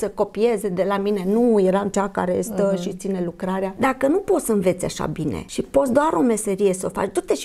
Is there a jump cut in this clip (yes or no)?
yes